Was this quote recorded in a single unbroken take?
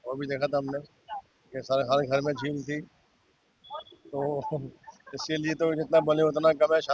yes; 0 cuts

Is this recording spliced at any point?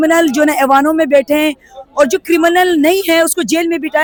no; 0 cuts

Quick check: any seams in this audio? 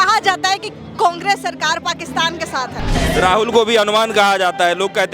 yes; 1 cut; at 2.9 s

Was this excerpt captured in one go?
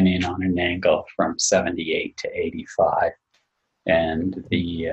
yes; 0 cuts

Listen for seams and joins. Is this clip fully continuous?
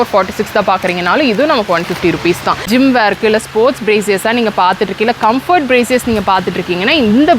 no; 1 cut; at 2.7 s

